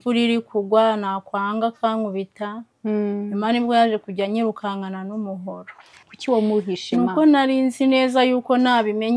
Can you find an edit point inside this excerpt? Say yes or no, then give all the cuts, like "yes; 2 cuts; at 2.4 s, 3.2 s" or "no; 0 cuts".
yes; 1 cut; at 5.9 s